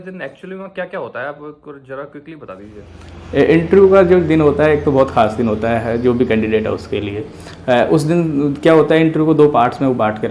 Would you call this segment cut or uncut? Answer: uncut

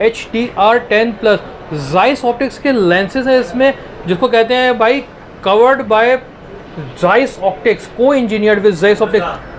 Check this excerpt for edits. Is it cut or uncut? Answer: uncut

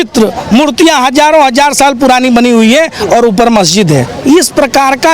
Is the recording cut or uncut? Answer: cut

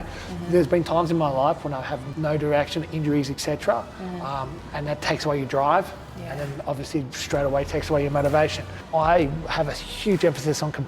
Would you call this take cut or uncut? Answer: cut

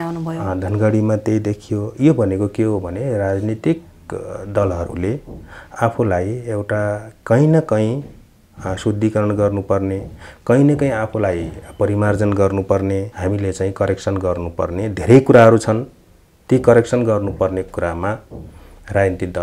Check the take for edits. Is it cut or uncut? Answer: cut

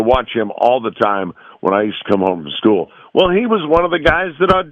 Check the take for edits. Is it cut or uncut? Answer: uncut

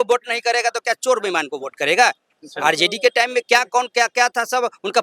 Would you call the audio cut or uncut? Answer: uncut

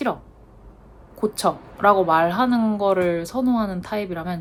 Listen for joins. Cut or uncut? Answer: uncut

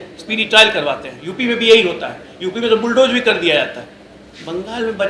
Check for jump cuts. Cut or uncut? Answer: uncut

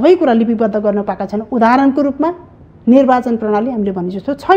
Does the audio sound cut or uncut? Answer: uncut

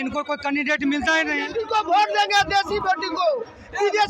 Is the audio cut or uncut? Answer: cut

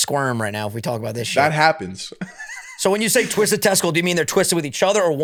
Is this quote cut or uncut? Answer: uncut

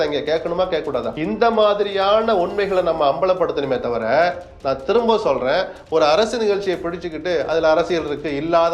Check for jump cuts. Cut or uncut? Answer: cut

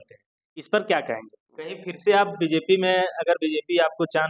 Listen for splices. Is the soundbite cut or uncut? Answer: cut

